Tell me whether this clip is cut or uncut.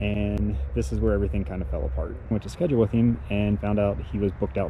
cut